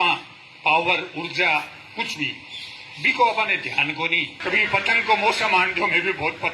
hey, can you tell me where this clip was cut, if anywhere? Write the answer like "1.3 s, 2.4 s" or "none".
4.4 s